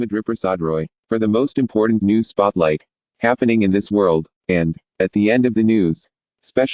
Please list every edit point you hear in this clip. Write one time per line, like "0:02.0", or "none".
0:00.9